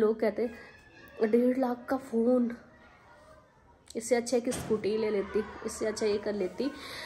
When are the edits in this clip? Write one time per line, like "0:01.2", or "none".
none